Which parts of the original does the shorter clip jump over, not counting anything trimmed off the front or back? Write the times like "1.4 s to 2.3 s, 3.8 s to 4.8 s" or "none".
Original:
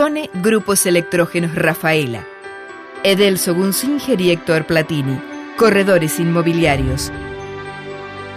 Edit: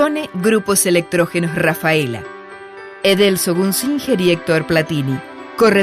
none